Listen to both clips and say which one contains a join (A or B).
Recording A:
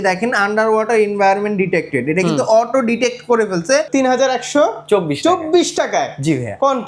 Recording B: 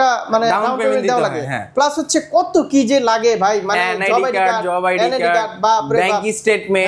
A